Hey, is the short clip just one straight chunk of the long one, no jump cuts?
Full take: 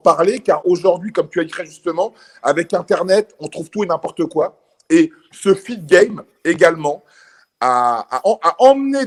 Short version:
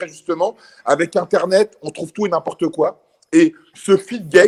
yes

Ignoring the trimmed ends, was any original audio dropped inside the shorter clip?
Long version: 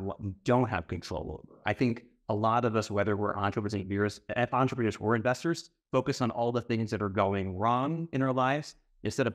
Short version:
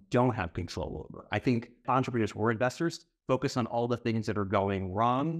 yes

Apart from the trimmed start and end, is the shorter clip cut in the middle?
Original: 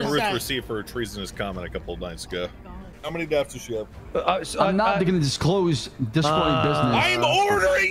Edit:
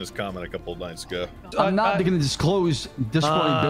yes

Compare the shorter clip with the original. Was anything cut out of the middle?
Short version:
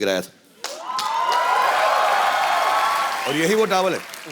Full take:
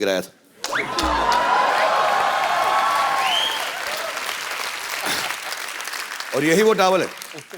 yes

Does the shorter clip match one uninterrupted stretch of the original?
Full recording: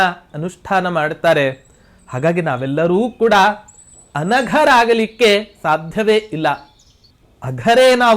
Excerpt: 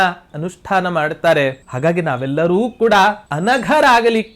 no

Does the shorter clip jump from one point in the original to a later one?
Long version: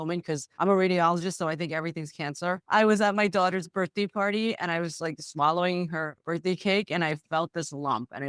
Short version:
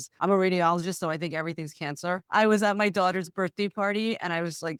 no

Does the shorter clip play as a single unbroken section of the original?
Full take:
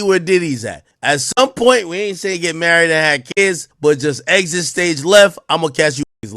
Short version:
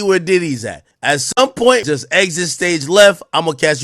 no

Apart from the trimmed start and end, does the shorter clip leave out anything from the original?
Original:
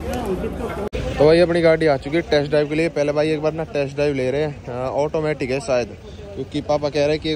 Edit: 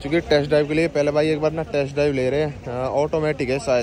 no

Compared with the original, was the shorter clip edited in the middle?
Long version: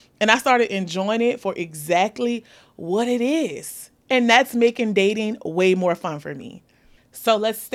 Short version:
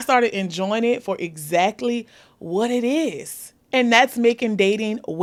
no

